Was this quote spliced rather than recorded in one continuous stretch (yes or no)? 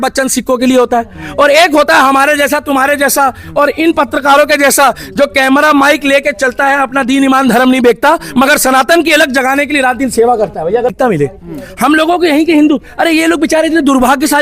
yes